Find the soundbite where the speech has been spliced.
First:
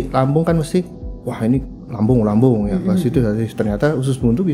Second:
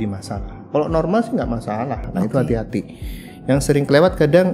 second; 1 cut; at 2.1 s

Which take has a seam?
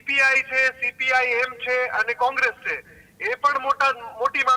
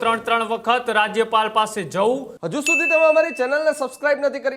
second; 1 cut; at 2.3 s

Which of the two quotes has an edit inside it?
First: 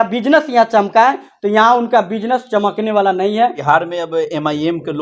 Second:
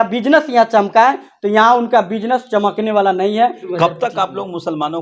second; 1 cut; at 3.6 s

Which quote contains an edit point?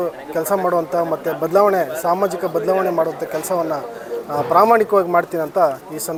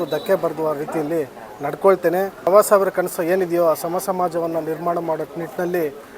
second; 1 cut; at 2.5 s

